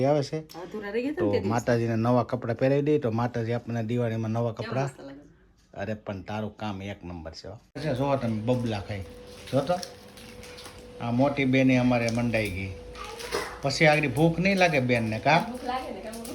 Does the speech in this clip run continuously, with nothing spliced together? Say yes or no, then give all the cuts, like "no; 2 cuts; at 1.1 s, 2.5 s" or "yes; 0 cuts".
no; 1 cut; at 7.8 s